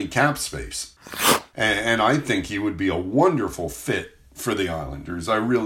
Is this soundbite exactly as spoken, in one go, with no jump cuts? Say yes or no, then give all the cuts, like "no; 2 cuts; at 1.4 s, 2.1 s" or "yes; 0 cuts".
no; 1 cut; at 1.0 s